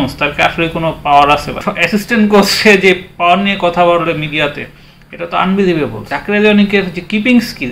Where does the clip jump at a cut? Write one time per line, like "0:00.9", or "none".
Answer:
0:01.6
0:06.1